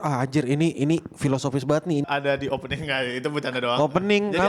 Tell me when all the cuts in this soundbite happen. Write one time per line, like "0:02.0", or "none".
0:02.0